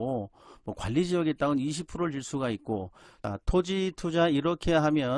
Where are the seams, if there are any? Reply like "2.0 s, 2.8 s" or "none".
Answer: 3.2 s